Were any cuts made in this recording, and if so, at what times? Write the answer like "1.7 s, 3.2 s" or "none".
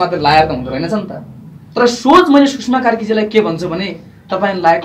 none